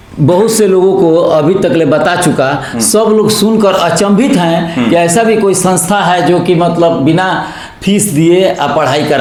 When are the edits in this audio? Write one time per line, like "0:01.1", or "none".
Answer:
none